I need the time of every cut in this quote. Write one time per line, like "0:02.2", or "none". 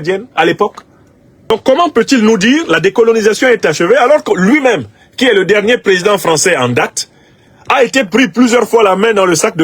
0:01.5

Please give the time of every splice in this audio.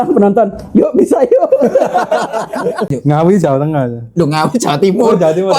0:02.9

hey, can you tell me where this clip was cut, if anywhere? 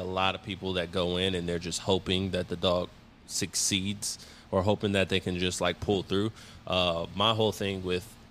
none

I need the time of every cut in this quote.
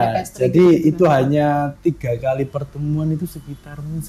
none

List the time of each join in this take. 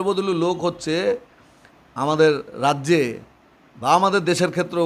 none

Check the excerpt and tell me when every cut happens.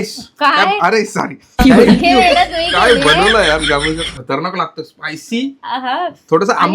0:01.5

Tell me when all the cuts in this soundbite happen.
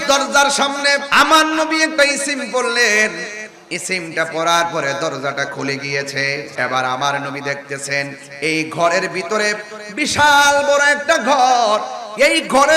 0:01.1
0:06.5

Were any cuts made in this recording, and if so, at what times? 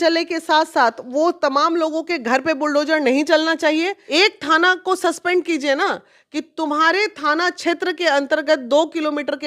0:04.0

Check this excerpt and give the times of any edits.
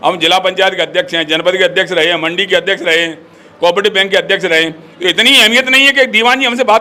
none

